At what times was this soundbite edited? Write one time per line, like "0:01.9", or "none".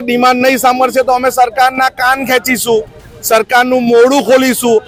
none